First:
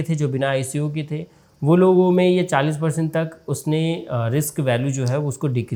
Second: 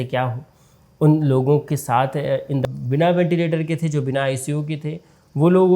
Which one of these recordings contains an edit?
second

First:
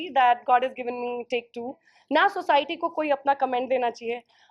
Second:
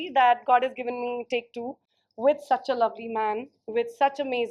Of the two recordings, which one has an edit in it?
first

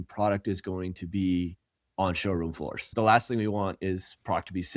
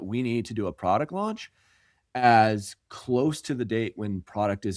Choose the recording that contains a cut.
first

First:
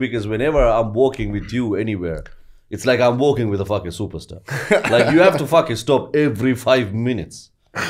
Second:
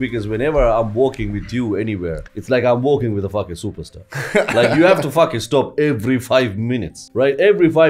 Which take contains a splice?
second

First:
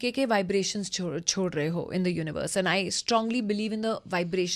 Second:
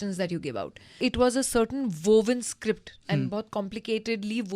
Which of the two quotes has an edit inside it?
second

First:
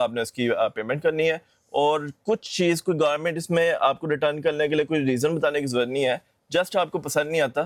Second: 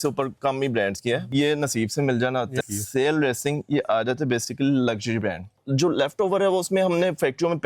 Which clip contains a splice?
second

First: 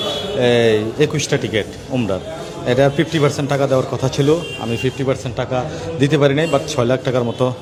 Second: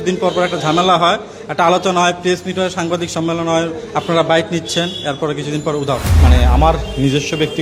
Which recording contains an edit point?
second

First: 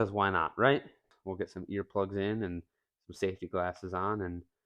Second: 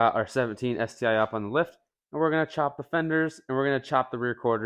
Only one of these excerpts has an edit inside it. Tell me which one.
first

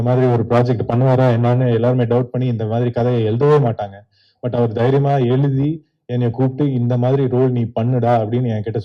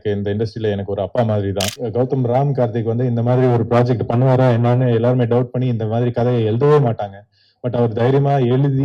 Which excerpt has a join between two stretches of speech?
second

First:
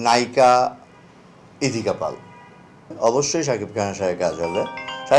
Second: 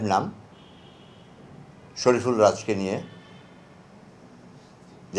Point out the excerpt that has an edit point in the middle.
first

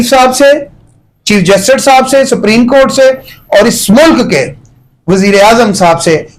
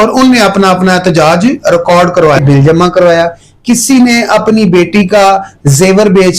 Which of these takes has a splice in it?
second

